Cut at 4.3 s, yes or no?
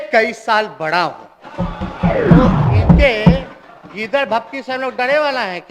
no